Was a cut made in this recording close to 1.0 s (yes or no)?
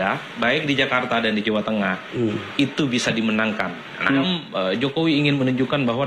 no